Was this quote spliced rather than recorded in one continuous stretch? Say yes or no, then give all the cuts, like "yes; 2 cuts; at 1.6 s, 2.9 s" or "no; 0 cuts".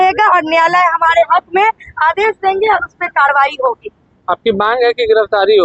no; 0 cuts